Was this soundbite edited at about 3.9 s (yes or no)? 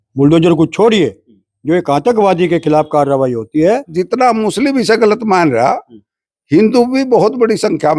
yes